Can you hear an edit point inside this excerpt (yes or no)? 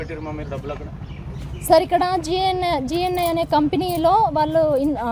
no